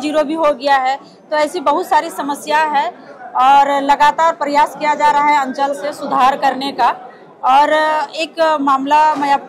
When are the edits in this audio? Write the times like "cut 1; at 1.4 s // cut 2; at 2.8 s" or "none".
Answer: none